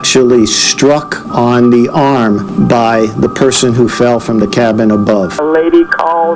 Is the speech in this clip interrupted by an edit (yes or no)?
yes